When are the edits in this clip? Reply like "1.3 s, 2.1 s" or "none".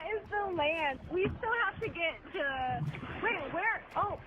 1.0 s, 3.1 s